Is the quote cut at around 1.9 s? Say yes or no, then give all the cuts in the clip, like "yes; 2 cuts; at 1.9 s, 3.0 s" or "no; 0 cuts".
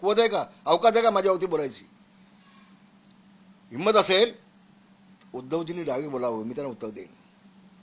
no; 0 cuts